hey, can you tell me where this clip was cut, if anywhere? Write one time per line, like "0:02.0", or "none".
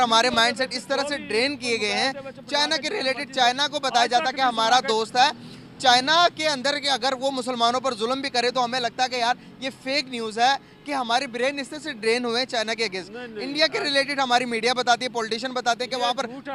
none

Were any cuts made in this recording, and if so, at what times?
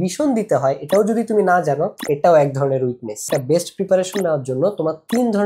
0:03.3

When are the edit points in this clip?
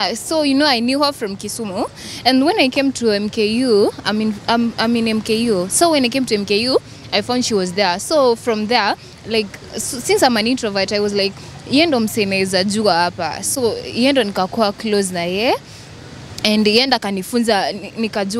none

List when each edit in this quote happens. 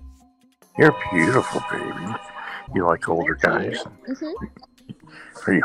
none

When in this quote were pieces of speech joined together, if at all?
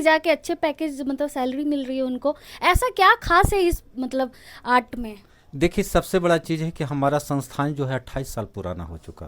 none

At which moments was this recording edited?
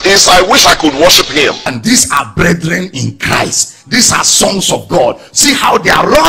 0:01.7

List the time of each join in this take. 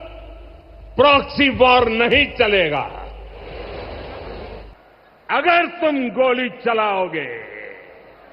0:04.7

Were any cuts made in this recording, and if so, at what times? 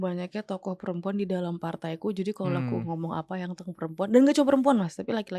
none

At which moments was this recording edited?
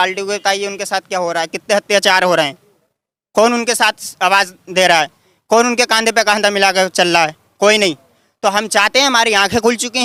none

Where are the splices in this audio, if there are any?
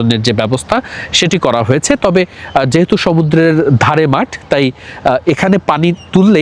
none

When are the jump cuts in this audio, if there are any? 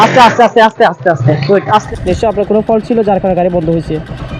0:01.9

